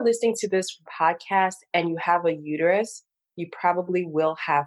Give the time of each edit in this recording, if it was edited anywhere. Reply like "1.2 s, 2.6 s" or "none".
none